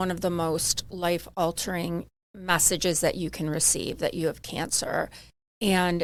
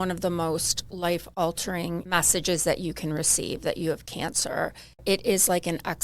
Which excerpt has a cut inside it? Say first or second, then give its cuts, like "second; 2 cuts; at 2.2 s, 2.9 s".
second; 2 cuts; at 2.0 s, 5.0 s